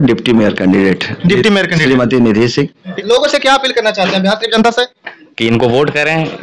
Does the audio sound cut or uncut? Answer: cut